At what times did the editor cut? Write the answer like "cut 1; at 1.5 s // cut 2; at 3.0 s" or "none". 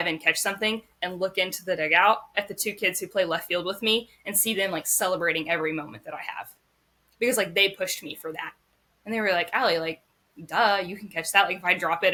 none